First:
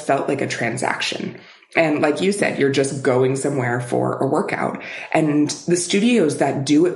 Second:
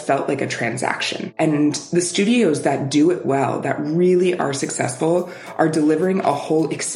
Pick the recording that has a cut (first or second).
second